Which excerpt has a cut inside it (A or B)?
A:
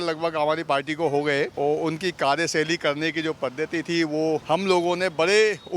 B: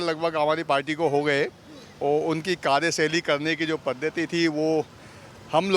A